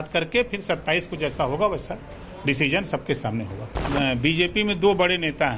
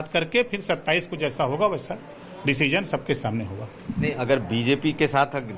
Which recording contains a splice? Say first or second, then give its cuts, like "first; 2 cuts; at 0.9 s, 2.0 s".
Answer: first; 1 cut; at 3.8 s